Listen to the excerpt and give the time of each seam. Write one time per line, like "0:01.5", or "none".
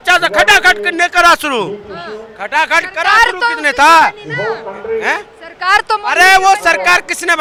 none